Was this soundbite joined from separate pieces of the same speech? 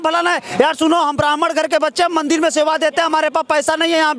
no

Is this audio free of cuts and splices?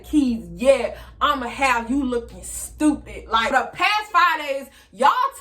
no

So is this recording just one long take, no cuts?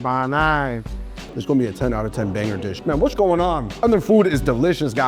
no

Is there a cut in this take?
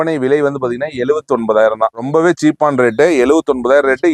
no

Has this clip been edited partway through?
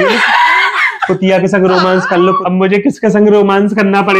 yes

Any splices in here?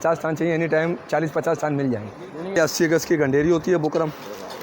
yes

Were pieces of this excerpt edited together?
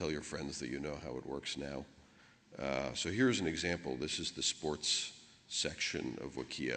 yes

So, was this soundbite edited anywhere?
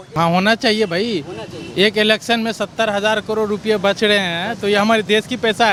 no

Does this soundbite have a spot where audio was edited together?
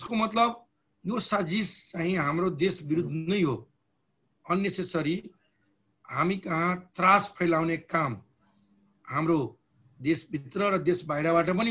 no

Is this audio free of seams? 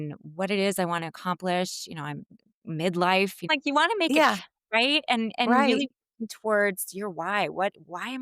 no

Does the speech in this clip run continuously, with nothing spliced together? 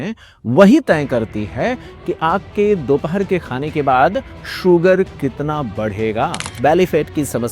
no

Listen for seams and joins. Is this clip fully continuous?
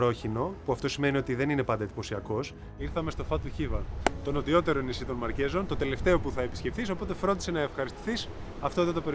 no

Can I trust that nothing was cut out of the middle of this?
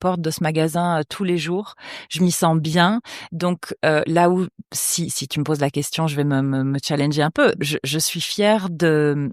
yes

